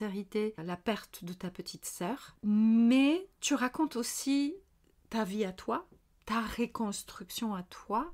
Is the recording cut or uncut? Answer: uncut